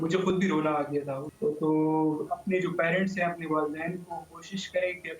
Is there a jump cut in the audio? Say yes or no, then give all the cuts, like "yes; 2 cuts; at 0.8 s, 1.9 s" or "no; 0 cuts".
yes; 1 cut; at 1.2 s